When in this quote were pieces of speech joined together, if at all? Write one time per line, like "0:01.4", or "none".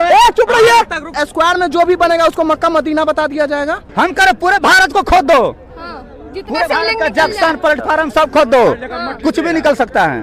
0:01.2
0:03.8